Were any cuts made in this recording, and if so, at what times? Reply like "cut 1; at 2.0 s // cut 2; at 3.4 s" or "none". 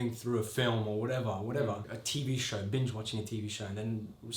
cut 1; at 2.0 s